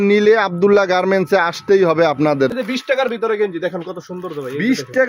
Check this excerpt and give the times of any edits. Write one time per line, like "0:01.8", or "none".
0:02.5

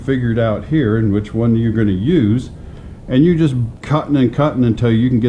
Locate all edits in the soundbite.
0:03.7

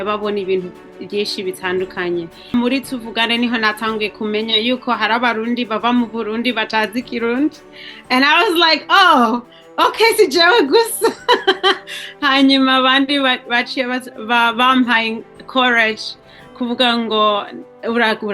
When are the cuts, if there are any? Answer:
0:02.5

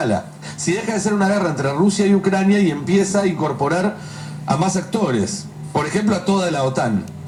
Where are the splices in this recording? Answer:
none

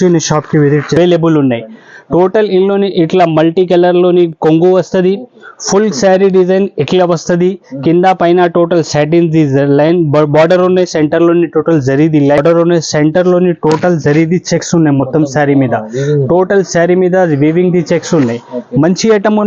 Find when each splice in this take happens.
0:01.0
0:12.4

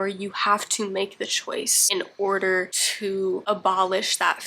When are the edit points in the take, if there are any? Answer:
0:01.8

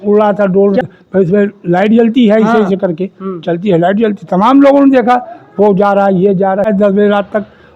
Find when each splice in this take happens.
0:01.0
0:06.7

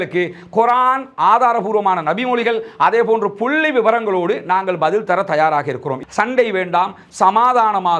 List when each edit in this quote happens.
0:06.0

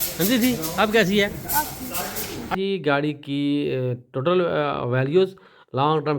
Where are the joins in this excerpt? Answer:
0:02.5

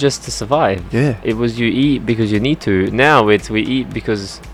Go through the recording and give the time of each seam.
none

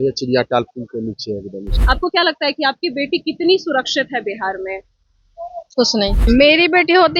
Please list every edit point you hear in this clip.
0:01.8
0:06.2

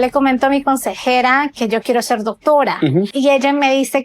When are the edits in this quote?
0:03.1

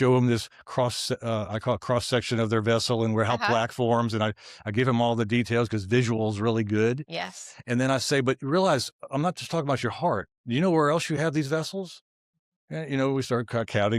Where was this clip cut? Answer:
none

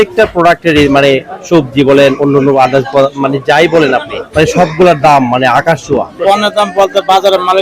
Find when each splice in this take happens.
0:04.2
0:06.1

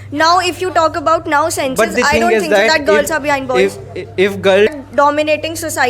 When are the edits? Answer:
0:04.7

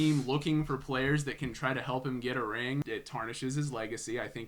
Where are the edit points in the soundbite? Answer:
0:02.8

